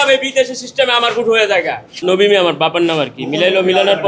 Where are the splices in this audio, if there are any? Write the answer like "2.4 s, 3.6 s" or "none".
1.8 s